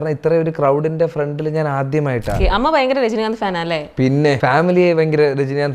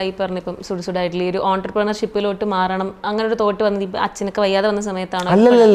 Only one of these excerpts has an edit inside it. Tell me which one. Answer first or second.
first